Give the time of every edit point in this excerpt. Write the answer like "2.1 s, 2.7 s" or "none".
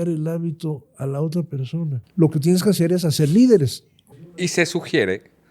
2.0 s, 4.4 s